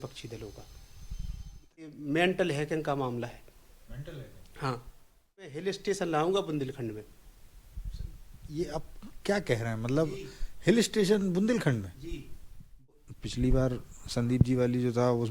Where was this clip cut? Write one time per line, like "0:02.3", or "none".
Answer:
0:01.9
0:05.6
0:12.9